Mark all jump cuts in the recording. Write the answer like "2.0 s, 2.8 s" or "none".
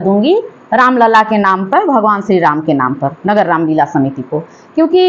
none